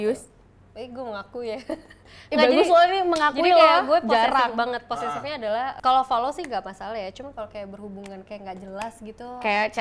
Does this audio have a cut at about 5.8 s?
yes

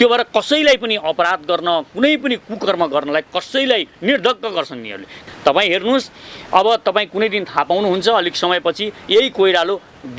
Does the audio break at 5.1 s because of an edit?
yes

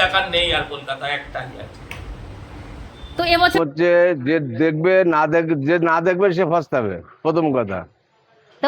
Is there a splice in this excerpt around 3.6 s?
yes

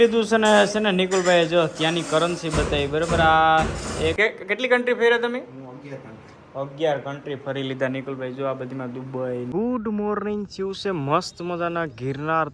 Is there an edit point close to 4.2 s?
yes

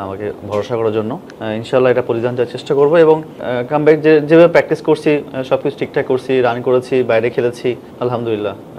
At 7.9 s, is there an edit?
yes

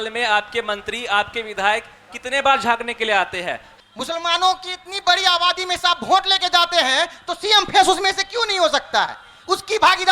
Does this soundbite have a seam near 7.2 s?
no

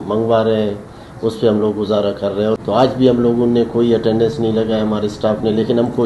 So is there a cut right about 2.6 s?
yes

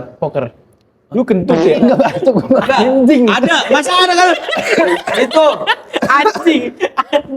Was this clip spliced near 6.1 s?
no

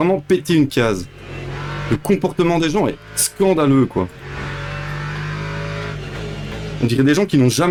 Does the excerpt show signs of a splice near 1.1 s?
no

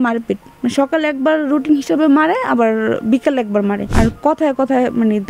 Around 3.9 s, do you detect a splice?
yes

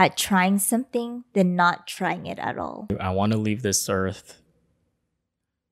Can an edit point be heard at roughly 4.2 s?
no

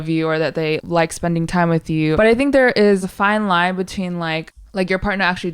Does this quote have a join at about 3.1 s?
yes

